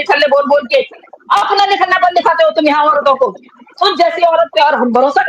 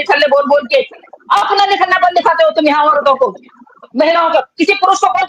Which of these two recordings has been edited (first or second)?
first